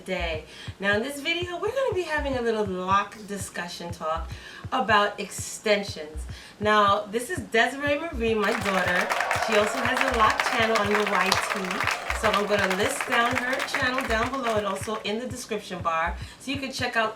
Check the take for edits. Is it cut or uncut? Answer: cut